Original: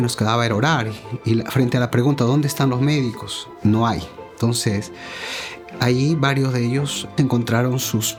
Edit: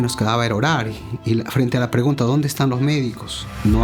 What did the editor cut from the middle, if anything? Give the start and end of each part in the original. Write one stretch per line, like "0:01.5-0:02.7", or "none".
none

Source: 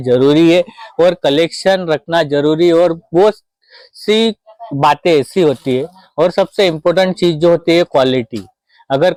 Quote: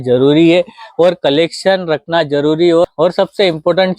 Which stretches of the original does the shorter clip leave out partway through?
0:02.9-0:06.1

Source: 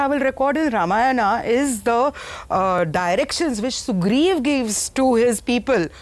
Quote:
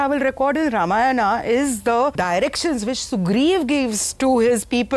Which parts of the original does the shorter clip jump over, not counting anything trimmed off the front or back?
0:02.2-0:02.9

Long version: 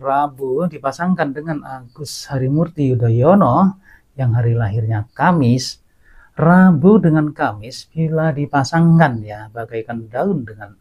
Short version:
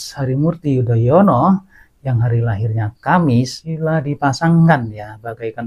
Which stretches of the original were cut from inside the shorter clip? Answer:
0:05.8-0:08.0

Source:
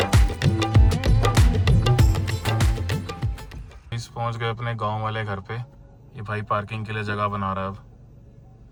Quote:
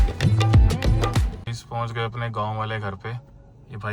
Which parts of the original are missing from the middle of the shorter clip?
0:01.5-0:03.7

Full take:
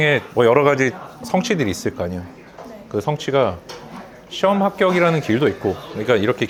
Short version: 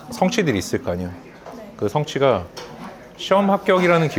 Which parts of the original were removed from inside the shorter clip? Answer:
none

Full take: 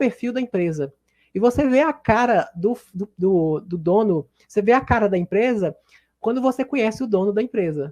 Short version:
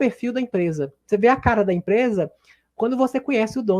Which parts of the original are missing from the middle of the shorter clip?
0:00.9-0:04.4

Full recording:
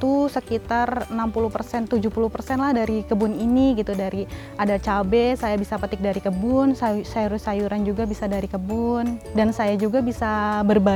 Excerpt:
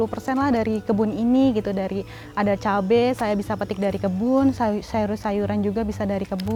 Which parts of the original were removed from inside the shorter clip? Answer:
none

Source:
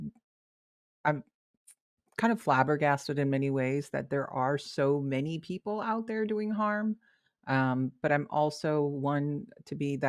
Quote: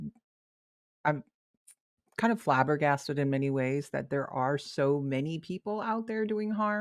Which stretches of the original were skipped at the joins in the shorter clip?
none

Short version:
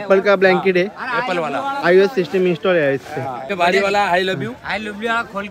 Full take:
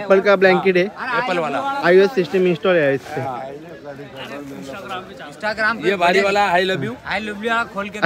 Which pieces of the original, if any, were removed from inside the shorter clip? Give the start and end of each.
0:03.5-0:06.0

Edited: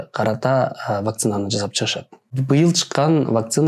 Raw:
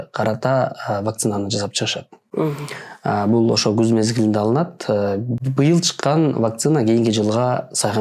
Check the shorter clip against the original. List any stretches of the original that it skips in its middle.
0:02.2-0:05.3

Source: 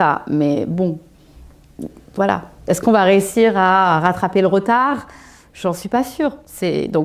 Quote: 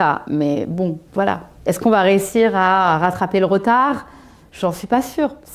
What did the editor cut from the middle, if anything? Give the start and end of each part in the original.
0:01.0-0:02.0

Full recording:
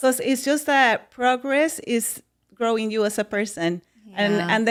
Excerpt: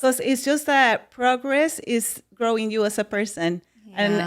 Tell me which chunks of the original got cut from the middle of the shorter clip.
0:02.2-0:02.4

